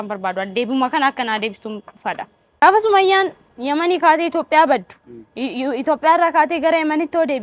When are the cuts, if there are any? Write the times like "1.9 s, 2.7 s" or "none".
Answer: 2.6 s